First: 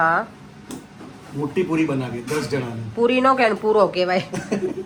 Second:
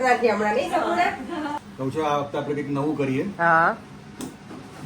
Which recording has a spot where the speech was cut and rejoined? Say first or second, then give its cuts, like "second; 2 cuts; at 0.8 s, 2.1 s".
second; 1 cut; at 1.6 s